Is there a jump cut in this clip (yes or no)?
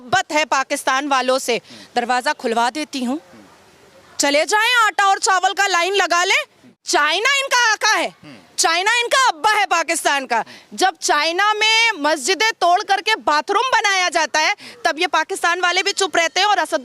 yes